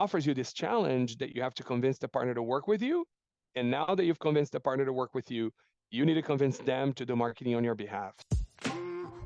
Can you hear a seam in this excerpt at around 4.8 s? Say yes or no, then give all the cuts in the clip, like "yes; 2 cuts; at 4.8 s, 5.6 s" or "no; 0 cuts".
no; 1 cut; at 8.3 s